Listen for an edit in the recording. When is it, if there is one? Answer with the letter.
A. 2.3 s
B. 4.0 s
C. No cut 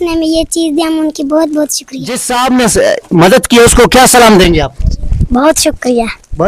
A